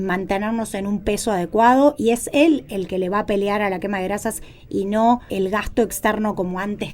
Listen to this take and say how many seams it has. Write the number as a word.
one